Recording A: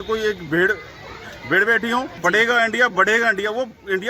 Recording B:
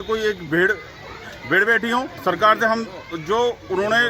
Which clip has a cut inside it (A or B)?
A